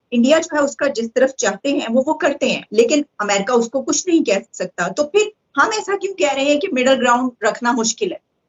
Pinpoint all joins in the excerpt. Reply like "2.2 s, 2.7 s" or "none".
none